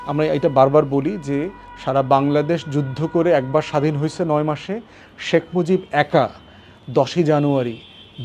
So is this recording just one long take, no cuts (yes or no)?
yes